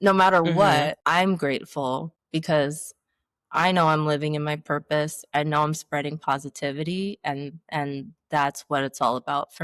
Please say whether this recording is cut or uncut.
cut